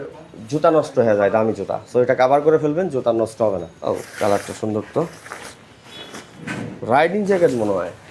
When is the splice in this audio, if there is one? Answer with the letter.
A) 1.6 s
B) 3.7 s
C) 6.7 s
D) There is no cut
B